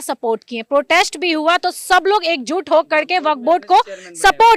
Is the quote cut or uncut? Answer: uncut